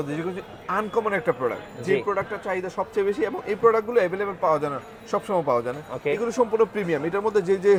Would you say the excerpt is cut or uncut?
uncut